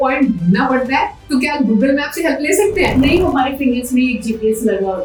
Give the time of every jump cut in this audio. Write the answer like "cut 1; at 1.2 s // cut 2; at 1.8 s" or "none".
none

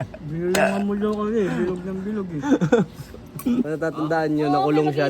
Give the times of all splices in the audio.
cut 1; at 3.7 s

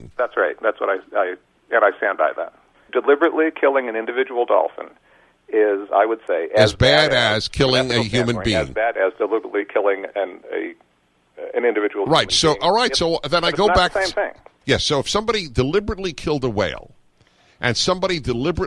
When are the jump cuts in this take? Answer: cut 1; at 2.8 s // cut 2; at 14.6 s

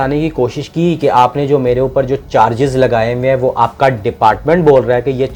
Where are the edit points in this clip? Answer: none

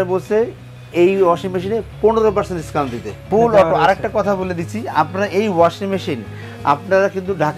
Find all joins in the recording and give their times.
cut 1; at 3.3 s

